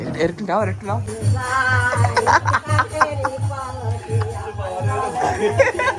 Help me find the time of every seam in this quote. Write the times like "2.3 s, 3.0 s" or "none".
1.1 s